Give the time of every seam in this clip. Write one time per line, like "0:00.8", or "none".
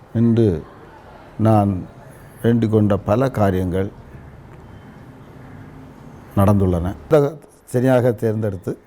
0:07.1